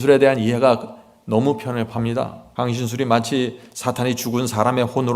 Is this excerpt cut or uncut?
cut